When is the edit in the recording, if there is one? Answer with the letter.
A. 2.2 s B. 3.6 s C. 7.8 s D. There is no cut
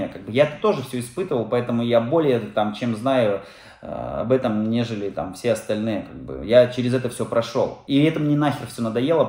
C